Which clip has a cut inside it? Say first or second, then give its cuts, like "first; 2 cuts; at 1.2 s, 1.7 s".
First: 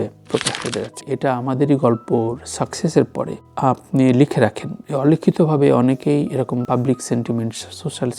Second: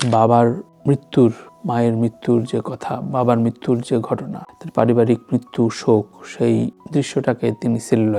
first; 1 cut; at 1.0 s